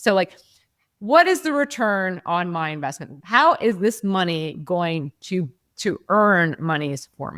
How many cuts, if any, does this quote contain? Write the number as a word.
one